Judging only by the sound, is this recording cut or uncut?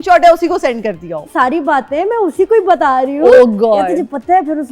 cut